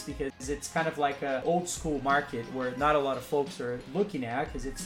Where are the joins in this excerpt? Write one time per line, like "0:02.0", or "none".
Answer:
0:01.4
0:03.8